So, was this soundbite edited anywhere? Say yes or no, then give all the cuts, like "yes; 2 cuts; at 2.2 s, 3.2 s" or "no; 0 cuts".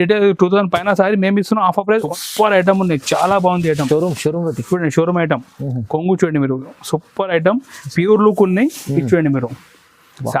yes; 1 cut; at 2.1 s